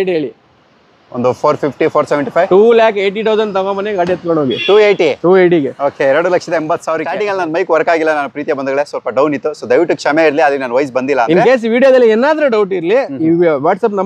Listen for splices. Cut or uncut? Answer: cut